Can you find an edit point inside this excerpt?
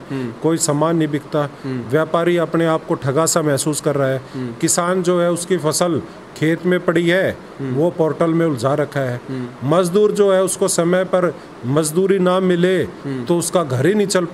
no; 0 cuts

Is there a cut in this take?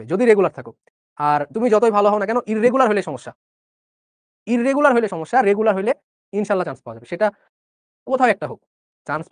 no; 0 cuts

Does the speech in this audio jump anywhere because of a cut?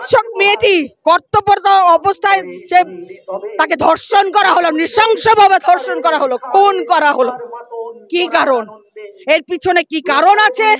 no; 0 cuts

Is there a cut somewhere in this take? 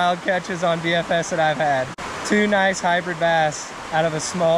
no; 0 cuts

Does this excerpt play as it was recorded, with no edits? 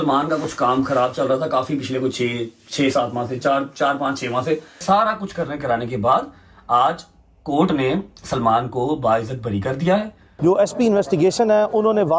no; 2 cuts; at 4.8 s, 10.2 s

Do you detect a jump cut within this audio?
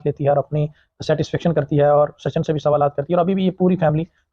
no; 0 cuts

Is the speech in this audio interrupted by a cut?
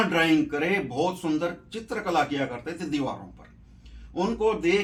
no; 0 cuts

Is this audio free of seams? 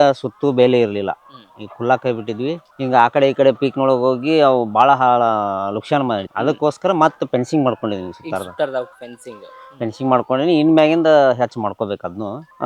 yes; 0 cuts

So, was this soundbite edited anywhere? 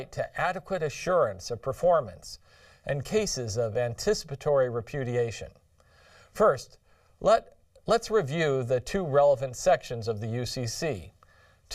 no; 0 cuts

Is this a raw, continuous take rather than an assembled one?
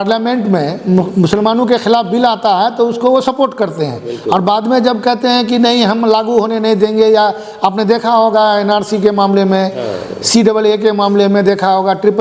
yes; 0 cuts

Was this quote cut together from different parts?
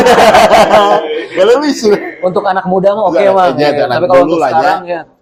no; 0 cuts

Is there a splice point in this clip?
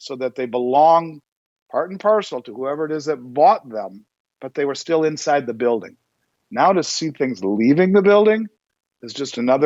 no; 0 cuts

